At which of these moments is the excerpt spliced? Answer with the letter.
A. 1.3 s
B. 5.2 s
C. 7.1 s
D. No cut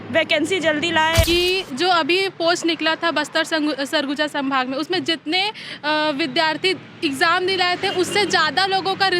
A